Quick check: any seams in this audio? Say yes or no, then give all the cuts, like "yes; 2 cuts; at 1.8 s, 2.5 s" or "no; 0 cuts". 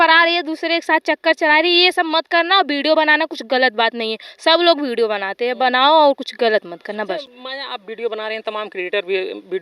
no; 0 cuts